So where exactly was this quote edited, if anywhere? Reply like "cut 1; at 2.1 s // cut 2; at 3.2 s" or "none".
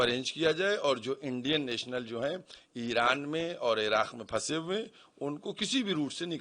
none